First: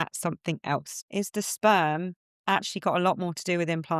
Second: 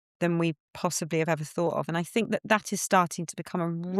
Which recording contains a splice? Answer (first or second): first